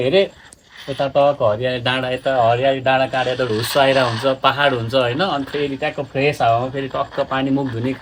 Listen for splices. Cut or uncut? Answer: uncut